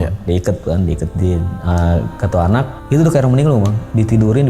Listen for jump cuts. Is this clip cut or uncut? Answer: cut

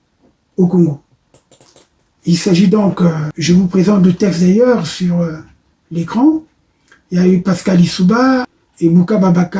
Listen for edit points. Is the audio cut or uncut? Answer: cut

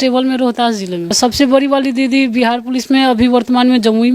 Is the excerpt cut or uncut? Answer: cut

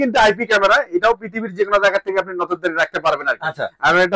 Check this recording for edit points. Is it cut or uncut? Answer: uncut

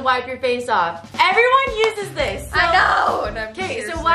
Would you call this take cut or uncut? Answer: uncut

